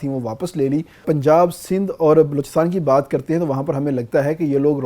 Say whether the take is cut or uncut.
cut